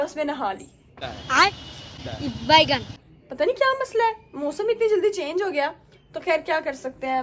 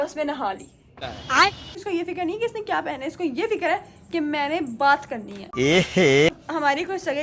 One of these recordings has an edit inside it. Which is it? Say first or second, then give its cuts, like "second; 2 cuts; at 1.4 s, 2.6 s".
second; 2 cuts; at 1.8 s, 6.3 s